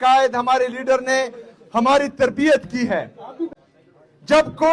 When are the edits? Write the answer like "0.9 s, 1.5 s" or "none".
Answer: 3.6 s